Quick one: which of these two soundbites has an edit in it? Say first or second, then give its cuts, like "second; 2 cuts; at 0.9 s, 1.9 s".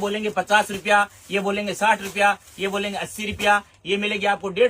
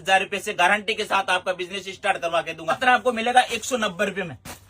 second; 1 cut; at 2.8 s